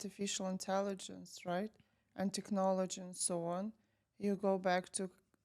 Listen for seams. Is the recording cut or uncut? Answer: uncut